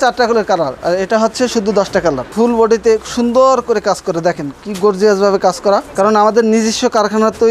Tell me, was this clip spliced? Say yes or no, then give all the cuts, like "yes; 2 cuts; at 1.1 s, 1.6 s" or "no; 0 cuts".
yes; 2 cuts; at 2.3 s, 5.9 s